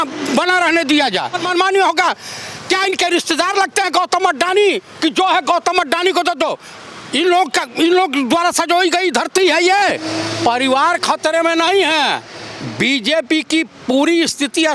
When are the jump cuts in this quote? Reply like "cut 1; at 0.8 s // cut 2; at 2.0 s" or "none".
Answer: cut 1; at 1.4 s // cut 2; at 10.0 s